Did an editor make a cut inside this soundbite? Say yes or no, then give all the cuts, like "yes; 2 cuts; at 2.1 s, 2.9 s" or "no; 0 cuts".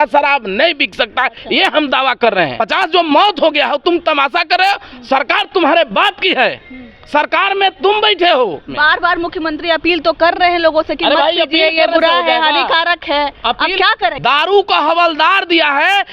yes; 3 cuts; at 2.6 s, 8.7 s, 14.2 s